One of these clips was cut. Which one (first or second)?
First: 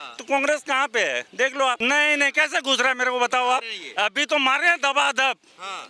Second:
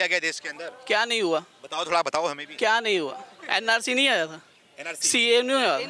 first